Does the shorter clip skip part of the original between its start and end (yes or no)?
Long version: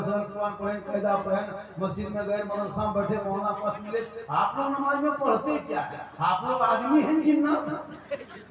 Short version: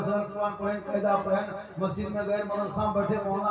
no